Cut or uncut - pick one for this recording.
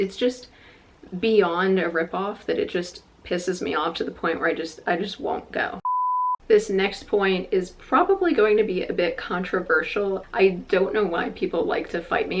cut